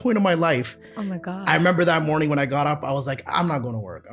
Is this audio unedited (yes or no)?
yes